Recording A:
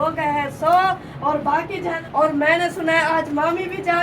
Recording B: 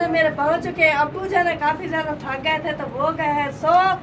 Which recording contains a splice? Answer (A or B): A